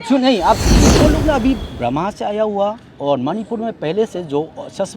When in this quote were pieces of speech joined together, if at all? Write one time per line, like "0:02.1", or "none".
0:01.0